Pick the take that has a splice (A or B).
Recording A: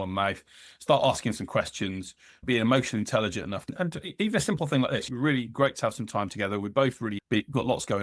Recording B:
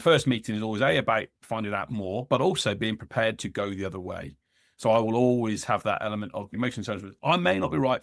A